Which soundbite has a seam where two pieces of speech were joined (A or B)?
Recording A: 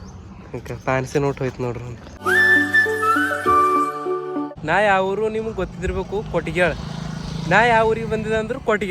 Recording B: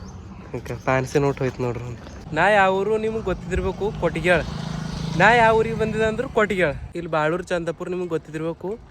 B